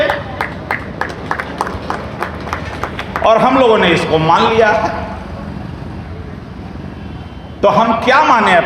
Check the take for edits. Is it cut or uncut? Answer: uncut